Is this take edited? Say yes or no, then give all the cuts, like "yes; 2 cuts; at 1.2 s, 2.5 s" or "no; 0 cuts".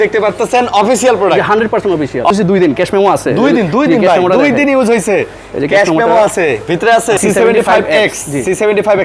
yes; 2 cuts; at 2.3 s, 7.2 s